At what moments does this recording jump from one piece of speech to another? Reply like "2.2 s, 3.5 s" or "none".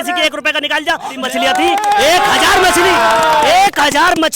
1.2 s